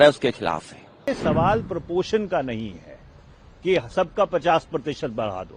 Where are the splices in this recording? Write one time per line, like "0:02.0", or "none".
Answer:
0:00.9